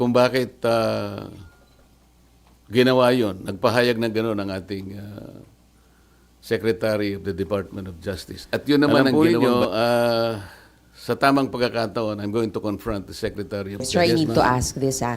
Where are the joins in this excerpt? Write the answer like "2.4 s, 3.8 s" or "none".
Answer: 9.1 s, 13.9 s